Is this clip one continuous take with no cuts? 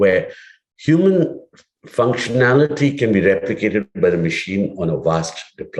yes; 0 cuts

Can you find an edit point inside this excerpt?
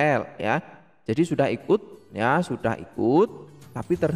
no; 0 cuts

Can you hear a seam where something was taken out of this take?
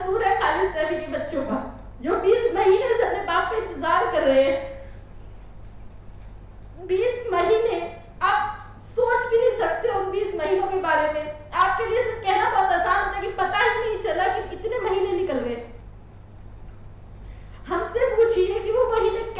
yes; 1 cut; at 15.8 s

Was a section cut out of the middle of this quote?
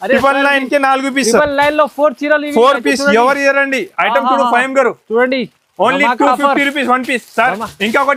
no; 0 cuts

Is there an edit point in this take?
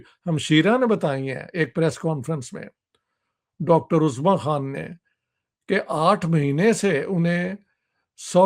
no; 0 cuts

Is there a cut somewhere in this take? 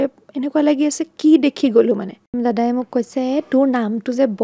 yes; 1 cut; at 2.3 s

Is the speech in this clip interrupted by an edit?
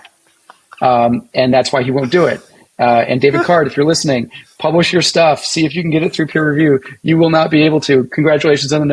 no; 0 cuts

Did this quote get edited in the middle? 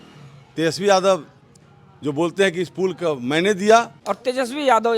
yes; 1 cut; at 4.0 s

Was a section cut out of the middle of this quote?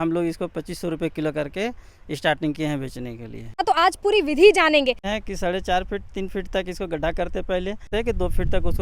yes; 3 cuts; at 3.6 s, 5.1 s, 7.9 s

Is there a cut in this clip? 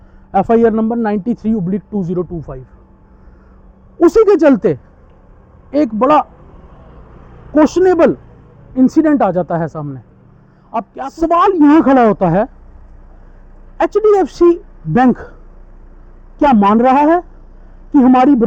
yes; 1 cut; at 10.9 s

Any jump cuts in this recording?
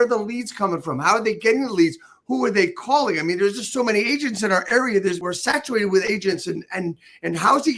yes; 1 cut; at 5.2 s

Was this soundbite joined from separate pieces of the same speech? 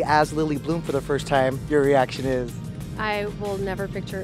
no; 0 cuts

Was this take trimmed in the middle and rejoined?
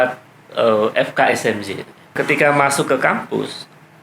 yes; 1 cut; at 2.2 s

